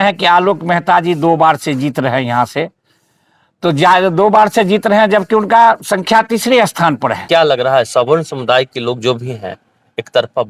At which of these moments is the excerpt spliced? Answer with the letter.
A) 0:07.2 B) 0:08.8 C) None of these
A